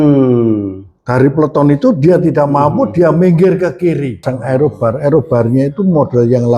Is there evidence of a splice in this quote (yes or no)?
yes